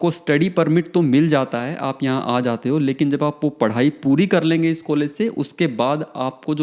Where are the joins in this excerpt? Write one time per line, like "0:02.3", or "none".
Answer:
none